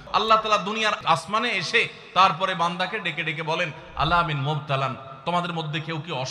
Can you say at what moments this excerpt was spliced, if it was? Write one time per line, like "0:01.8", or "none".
0:01.0

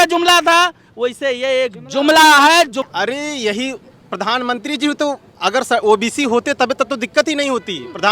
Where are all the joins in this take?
0:02.8

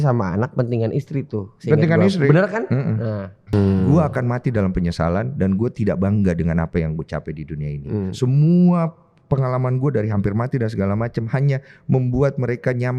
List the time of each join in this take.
0:03.5

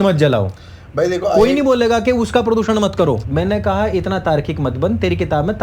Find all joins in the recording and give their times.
0:03.2

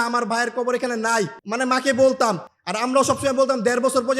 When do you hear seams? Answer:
0:01.4

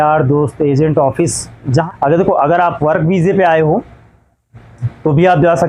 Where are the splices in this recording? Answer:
0:01.6

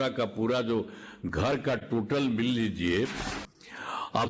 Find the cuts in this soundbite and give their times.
0:03.3

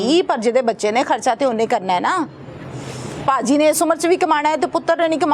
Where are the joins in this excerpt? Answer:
none

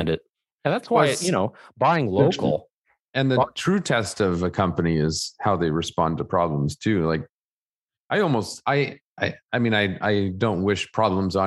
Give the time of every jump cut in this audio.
none

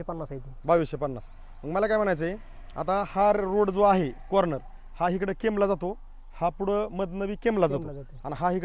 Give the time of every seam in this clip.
none

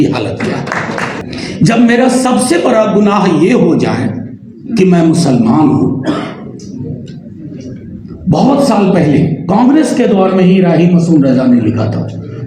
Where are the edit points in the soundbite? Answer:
0:01.2

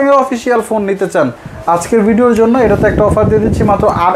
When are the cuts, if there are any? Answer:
0:01.4

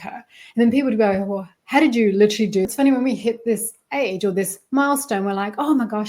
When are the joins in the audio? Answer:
0:02.7

